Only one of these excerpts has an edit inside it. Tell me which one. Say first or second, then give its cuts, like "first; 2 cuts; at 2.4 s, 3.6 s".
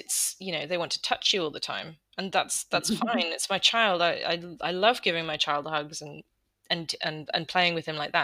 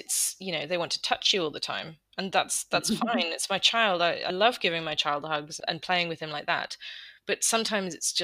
second; 2 cuts; at 4.3 s, 5.6 s